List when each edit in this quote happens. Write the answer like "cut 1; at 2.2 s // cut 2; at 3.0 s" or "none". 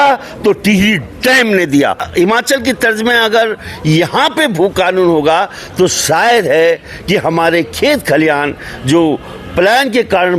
cut 1; at 2.1 s